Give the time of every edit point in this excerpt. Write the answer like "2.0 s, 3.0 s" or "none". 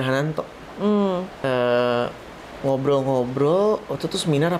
1.3 s